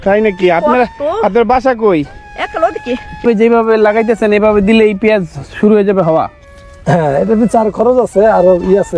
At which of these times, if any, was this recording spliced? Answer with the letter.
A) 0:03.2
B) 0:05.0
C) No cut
A